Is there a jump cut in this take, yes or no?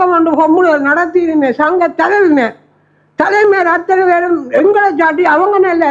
no